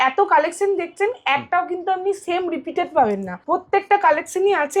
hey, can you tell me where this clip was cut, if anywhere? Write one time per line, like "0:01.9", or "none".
0:03.3